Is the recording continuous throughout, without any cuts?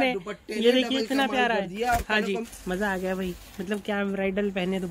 no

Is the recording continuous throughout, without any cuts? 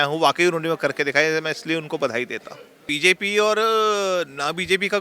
no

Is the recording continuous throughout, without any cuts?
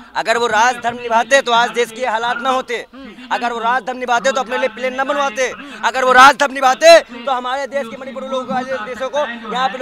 yes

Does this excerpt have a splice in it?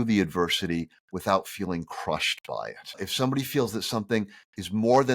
yes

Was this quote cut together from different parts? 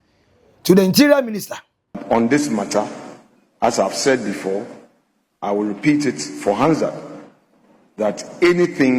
yes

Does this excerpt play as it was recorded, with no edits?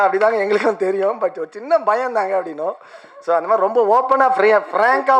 yes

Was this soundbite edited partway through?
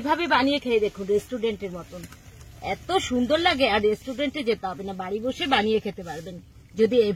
no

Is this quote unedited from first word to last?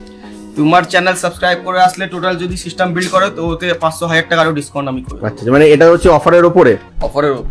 yes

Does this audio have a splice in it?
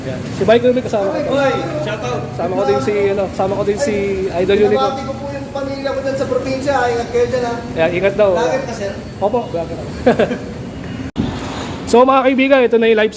no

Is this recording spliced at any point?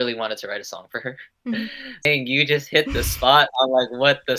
yes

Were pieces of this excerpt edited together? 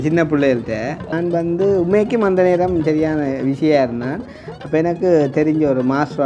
yes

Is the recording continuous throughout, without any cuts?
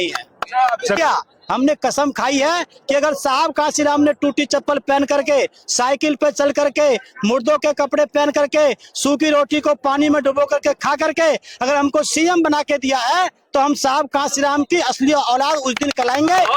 no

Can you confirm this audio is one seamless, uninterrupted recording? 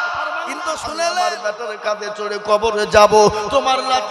no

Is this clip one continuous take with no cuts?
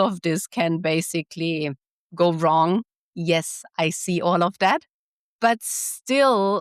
no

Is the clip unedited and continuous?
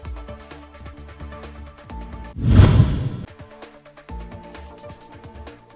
no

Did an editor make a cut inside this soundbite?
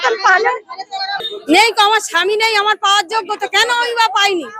yes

